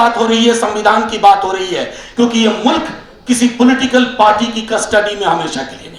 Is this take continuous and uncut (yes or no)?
yes